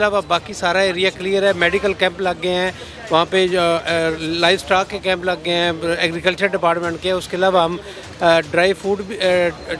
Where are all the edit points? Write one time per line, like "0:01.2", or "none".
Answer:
none